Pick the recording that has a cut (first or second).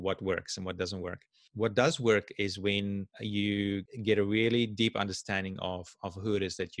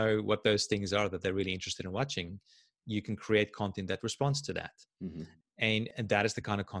first